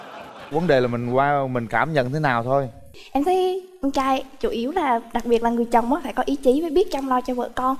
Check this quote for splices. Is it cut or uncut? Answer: cut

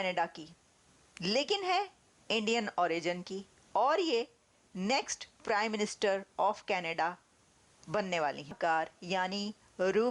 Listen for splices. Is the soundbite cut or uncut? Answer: cut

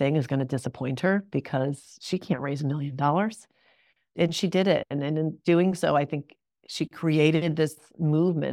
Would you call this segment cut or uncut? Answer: uncut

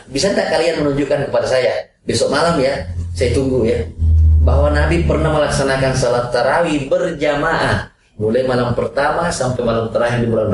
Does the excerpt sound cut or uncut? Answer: uncut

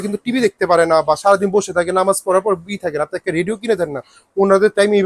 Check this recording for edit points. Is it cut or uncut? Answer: uncut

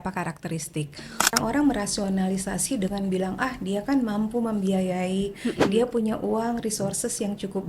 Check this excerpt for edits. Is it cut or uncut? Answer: cut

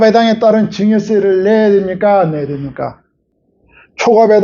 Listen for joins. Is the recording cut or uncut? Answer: cut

